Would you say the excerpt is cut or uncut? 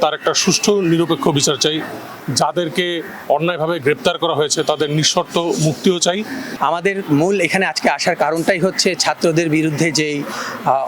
cut